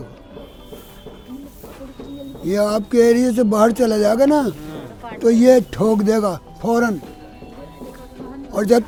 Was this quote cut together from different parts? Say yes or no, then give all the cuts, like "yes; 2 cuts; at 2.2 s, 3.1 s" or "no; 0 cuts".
no; 0 cuts